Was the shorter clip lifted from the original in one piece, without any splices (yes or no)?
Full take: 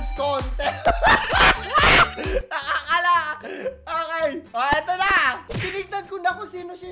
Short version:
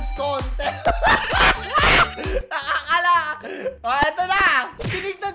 no